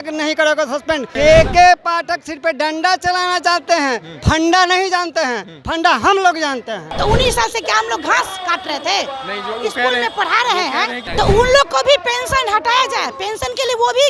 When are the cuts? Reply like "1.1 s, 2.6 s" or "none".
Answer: 1.1 s, 6.9 s, 11.1 s